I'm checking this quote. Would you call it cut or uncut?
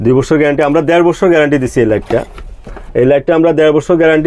uncut